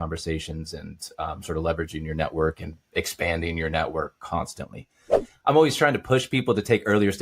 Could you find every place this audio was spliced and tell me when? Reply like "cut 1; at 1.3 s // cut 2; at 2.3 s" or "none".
cut 1; at 5.2 s